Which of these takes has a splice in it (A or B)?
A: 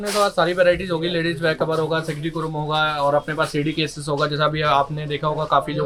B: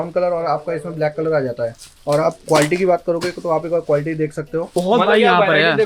B